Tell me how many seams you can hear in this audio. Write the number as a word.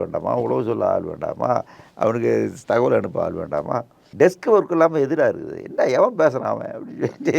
one